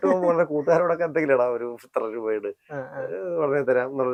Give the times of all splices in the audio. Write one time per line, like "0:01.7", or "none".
none